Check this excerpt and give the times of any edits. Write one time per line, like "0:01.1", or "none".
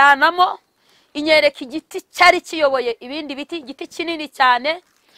none